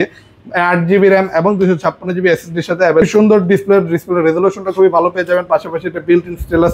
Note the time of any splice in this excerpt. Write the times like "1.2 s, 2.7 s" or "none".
3.0 s